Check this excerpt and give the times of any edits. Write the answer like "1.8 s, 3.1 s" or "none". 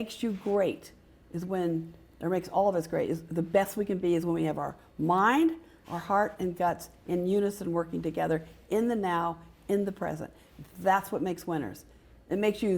none

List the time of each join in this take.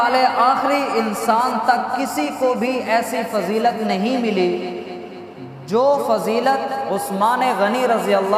none

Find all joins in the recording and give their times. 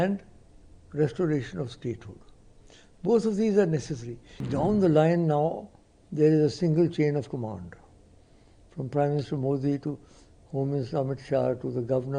4.4 s

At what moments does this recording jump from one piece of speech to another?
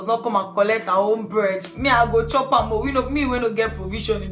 none

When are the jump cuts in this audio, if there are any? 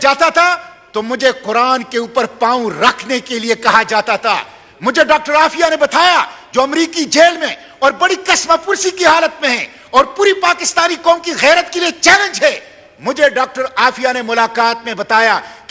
none

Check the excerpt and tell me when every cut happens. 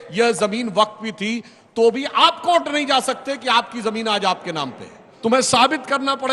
5.1 s

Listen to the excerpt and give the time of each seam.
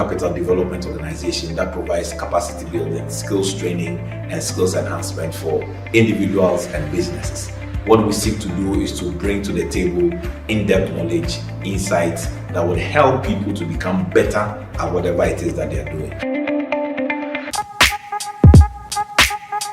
17.5 s

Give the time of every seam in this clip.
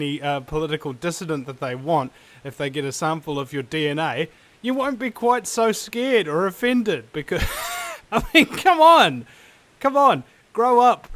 none

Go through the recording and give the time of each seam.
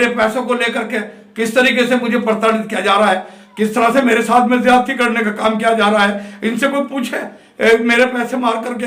none

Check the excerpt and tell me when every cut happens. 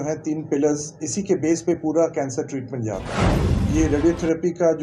3.5 s

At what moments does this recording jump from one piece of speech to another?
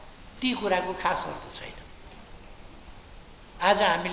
none

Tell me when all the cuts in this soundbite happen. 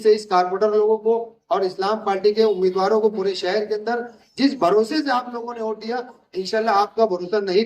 none

